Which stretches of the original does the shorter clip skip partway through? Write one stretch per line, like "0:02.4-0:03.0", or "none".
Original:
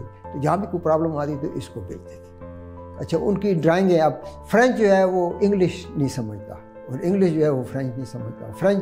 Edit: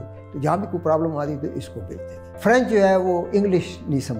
0:02.2-0:04.3